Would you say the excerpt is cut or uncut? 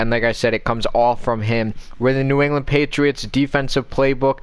cut